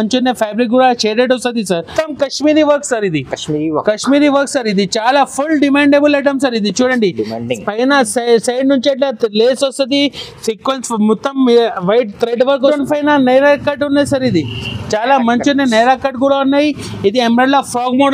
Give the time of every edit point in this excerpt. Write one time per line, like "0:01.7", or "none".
0:01.9
0:12.7